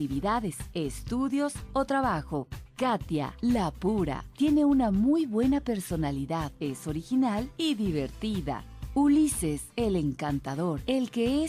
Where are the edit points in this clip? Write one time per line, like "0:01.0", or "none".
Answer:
none